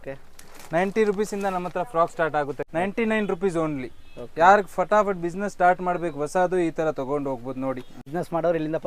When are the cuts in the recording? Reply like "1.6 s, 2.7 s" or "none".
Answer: 2.6 s, 8.1 s